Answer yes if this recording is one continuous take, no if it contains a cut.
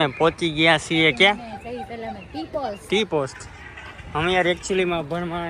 yes